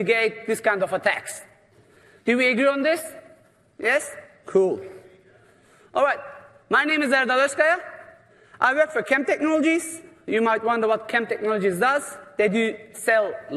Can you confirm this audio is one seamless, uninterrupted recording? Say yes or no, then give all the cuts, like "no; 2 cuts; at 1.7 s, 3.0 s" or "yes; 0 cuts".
yes; 0 cuts